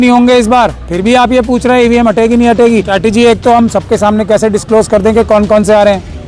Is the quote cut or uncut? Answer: cut